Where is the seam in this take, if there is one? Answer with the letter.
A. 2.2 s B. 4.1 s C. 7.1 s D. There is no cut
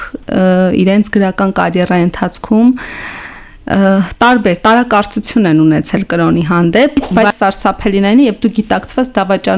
C